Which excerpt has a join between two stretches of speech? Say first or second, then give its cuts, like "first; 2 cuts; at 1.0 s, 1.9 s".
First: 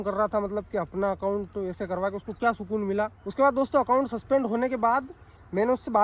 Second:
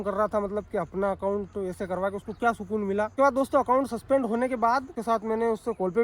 second; 2 cuts; at 3.1 s, 4.9 s